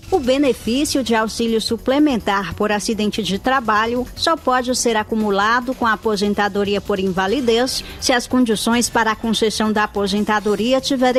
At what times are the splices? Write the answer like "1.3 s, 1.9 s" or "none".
none